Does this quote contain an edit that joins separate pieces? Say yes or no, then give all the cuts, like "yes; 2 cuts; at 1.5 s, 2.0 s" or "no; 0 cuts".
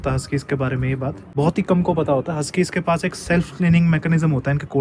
yes; 1 cut; at 1.2 s